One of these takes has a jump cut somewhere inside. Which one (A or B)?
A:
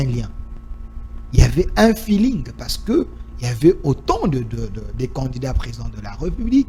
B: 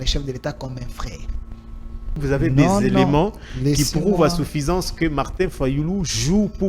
B